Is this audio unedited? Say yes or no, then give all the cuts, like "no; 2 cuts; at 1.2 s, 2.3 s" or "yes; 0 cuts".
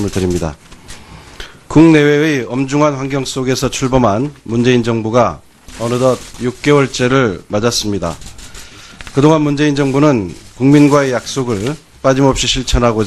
yes; 0 cuts